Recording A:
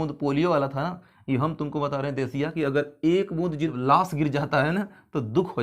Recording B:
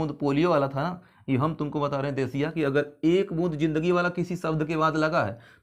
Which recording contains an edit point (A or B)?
A